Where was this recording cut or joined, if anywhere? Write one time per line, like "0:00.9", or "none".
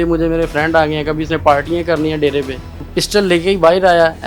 0:02.9